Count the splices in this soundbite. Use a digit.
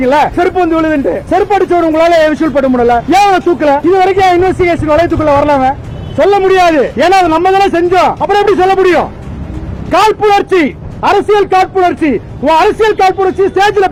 0